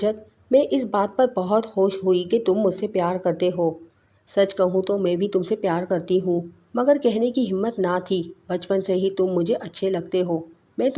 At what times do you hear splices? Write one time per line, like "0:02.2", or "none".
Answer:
none